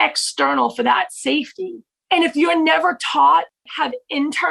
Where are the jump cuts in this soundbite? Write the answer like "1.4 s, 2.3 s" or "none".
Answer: 1.8 s, 3.6 s